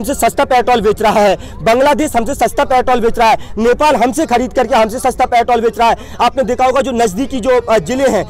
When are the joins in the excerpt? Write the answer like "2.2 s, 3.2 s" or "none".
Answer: none